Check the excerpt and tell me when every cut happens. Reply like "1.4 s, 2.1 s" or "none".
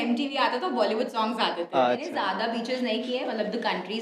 2.2 s